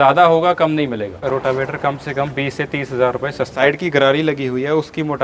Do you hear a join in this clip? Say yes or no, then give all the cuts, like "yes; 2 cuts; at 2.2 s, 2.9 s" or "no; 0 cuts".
yes; 2 cuts; at 1.1 s, 3.5 s